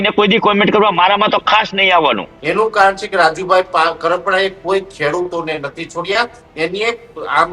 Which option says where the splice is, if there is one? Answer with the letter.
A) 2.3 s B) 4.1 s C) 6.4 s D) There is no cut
A